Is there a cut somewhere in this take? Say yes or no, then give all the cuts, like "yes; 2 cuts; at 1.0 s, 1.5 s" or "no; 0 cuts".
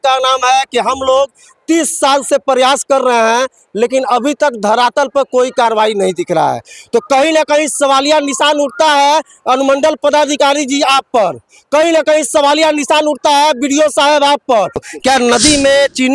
yes; 1 cut; at 14.7 s